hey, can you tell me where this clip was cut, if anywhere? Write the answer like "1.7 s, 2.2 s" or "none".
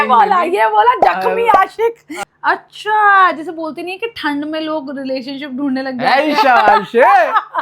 2.1 s